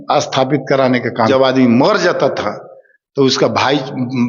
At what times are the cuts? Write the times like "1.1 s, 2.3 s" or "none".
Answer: 1.3 s